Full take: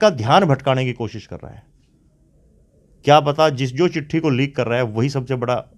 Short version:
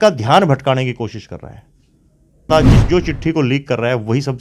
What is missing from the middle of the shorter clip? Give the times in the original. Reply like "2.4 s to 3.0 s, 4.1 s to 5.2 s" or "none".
2.5 s to 3.4 s